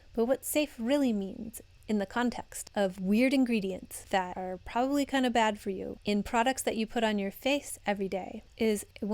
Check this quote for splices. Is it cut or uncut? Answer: cut